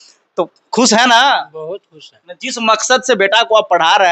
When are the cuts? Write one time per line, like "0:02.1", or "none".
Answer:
none